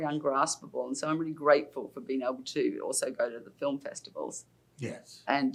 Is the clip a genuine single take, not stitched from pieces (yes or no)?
yes